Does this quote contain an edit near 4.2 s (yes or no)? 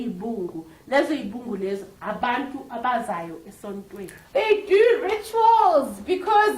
yes